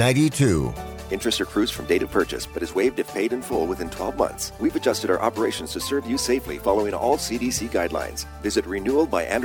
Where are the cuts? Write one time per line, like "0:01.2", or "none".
0:04.5